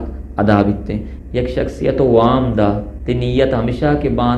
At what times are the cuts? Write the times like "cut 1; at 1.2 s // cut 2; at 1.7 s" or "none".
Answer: cut 1; at 1.1 s // cut 2; at 2.9 s